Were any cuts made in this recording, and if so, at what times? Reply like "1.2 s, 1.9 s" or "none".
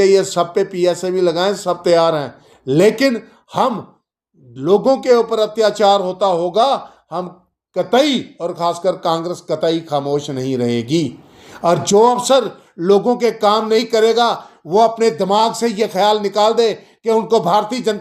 none